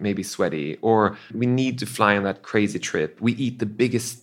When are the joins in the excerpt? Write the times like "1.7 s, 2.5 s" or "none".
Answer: 1.3 s